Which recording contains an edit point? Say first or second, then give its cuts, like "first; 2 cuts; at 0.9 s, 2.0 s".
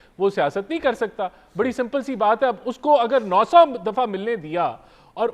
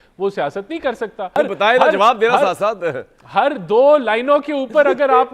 second; 1 cut; at 1.4 s